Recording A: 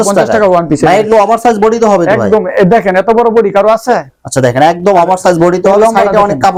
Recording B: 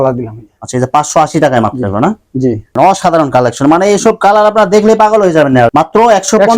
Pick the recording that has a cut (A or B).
B